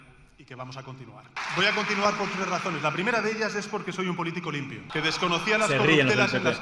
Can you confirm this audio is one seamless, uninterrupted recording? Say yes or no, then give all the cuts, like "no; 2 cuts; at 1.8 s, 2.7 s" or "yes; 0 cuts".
no; 2 cuts; at 1.4 s, 4.8 s